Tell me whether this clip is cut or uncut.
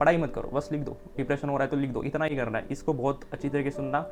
uncut